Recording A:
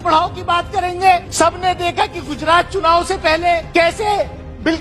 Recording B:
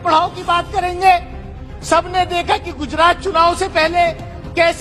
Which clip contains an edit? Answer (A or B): A